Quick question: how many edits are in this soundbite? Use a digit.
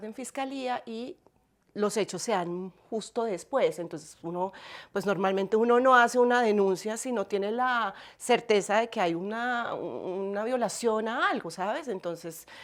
0